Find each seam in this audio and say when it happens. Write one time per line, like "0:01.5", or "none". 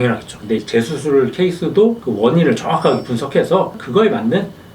0:03.7